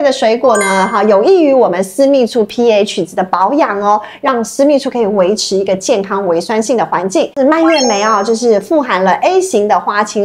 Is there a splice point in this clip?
no; 0 cuts

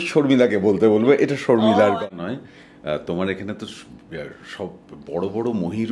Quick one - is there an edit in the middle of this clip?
yes; 1 cut; at 2.0 s

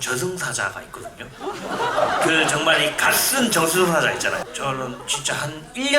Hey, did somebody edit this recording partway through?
yes; 1 cut; at 4.4 s

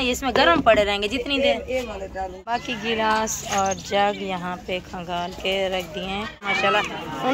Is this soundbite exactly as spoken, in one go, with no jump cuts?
no; 2 cuts; at 2.4 s, 6.5 s

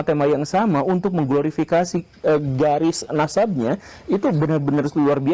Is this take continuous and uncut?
yes; 0 cuts

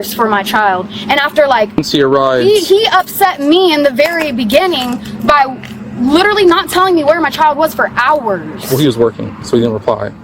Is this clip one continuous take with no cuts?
no; 1 cut; at 1.8 s

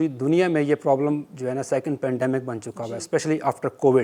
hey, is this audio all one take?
yes; 0 cuts

